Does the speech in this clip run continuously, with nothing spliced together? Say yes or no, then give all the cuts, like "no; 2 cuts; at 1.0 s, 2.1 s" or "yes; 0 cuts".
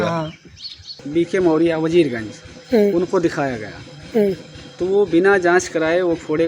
no; 1 cut; at 0.9 s